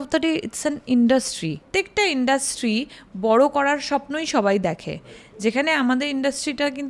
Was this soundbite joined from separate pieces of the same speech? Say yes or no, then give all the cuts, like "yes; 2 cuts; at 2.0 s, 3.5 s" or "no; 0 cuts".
yes; 1 cut; at 1.6 s